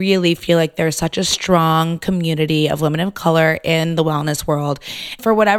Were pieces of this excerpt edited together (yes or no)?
no